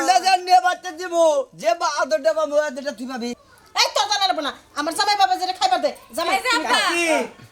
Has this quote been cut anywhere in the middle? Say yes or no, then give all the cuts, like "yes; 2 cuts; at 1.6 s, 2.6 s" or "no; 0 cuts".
yes; 1 cut; at 3.4 s